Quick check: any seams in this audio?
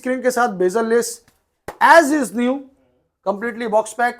no; 0 cuts

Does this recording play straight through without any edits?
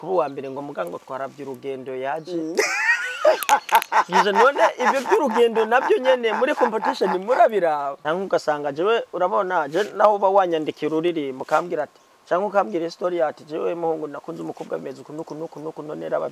no; 1 cut; at 7.9 s

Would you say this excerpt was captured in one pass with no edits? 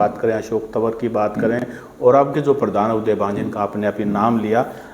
yes; 0 cuts

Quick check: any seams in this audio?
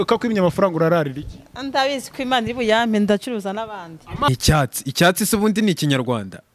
yes; 1 cut; at 4.3 s

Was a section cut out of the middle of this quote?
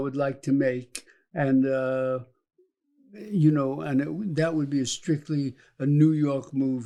no; 0 cuts

